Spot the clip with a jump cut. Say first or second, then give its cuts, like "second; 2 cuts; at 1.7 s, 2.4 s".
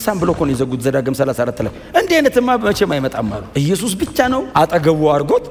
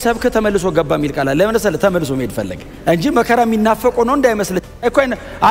first; 2 cuts; at 3.4 s, 4.5 s